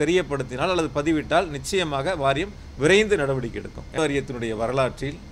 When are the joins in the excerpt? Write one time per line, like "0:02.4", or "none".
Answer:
0:03.9